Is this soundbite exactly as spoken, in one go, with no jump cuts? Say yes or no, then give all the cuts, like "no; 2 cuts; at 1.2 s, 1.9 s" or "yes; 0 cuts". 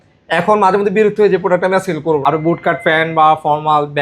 no; 1 cut; at 2.2 s